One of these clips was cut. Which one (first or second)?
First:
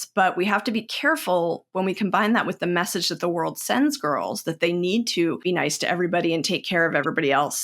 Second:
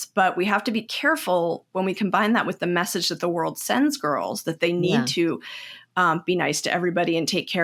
first